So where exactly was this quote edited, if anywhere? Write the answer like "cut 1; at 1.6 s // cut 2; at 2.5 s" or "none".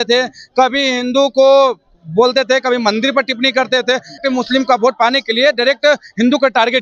cut 1; at 4.2 s